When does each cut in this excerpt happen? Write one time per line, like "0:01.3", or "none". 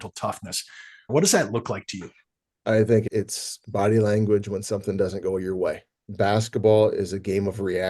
0:01.0
0:06.1